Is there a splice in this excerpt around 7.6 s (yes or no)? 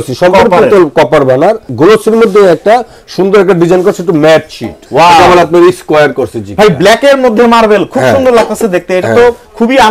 no